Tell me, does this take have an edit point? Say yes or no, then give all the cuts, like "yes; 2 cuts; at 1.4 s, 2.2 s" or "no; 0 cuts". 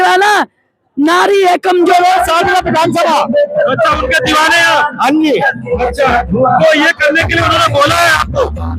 yes; 1 cut; at 1.9 s